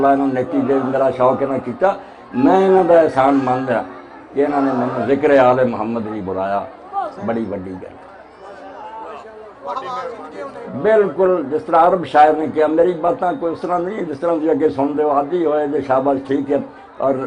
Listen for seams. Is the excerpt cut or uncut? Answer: cut